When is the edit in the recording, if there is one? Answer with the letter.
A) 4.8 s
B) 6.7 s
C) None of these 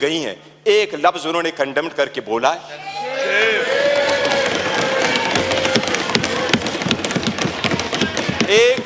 C